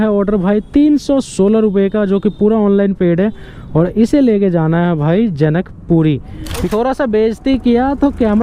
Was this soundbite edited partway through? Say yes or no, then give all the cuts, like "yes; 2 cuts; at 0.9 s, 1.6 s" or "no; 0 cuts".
yes; 1 cut; at 6.6 s